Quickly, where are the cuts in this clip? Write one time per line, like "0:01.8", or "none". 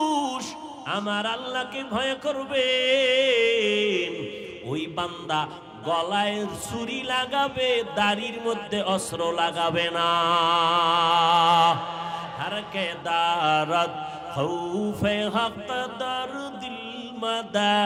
none